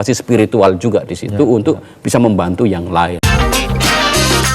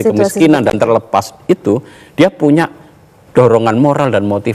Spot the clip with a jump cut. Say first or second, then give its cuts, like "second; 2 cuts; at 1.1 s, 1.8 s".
first; 1 cut; at 3.2 s